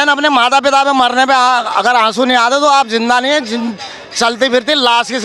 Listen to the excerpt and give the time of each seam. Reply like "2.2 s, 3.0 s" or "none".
none